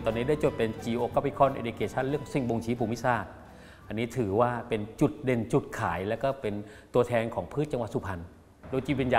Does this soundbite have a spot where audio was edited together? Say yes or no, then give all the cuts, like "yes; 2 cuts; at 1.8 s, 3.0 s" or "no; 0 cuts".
no; 0 cuts